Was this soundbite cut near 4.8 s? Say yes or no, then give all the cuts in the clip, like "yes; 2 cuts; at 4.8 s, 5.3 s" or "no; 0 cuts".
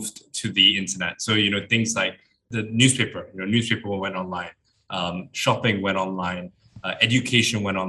no; 1 cut; at 2.4 s